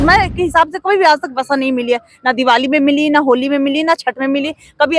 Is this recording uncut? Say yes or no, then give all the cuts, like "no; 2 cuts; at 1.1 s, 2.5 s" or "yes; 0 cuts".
yes; 0 cuts